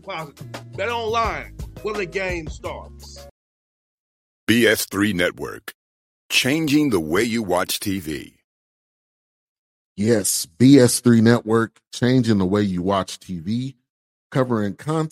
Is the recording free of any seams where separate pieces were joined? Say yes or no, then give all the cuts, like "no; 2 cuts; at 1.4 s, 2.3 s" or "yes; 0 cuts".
no; 1 cut; at 3.3 s